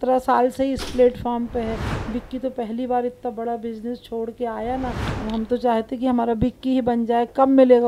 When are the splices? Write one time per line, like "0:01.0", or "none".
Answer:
0:05.1